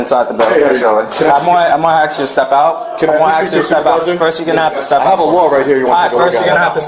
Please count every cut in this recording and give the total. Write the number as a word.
zero